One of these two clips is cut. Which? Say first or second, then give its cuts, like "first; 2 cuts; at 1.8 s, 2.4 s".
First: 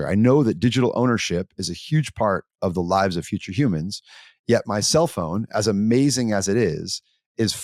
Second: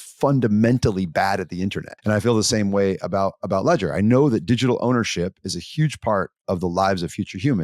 second; 1 cut; at 1.9 s